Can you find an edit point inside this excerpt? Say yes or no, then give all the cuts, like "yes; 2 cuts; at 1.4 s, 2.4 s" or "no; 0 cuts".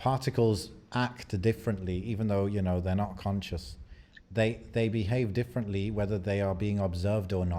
no; 0 cuts